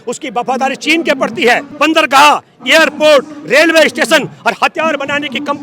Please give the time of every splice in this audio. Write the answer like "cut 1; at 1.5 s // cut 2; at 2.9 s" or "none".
cut 1; at 1.7 s